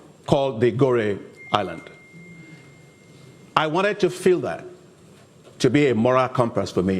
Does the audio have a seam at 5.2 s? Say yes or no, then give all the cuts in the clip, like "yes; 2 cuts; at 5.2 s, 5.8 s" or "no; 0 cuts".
no; 0 cuts